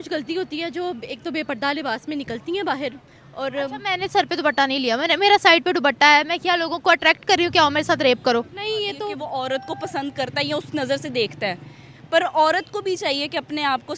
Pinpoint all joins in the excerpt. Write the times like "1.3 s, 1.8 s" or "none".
9.2 s